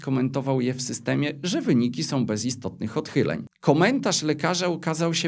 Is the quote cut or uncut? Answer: cut